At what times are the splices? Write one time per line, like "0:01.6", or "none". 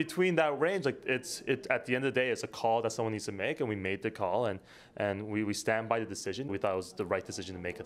0:06.5